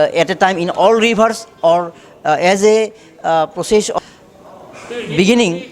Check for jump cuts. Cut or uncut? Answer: cut